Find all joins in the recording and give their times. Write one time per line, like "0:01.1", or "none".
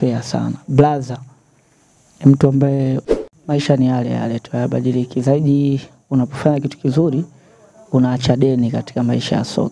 0:03.2